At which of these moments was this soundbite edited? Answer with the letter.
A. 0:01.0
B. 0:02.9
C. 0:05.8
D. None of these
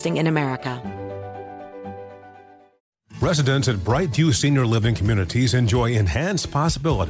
B